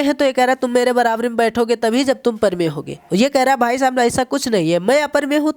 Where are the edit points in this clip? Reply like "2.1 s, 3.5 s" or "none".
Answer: none